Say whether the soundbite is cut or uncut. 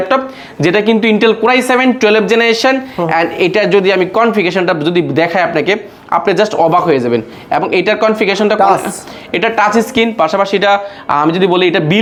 uncut